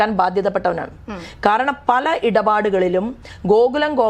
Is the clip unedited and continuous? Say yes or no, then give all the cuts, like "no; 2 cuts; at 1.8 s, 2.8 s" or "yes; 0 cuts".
yes; 0 cuts